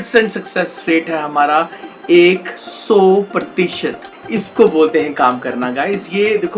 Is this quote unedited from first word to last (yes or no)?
no